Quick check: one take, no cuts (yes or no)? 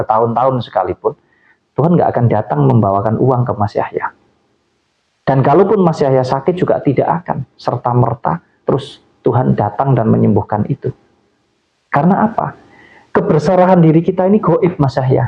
yes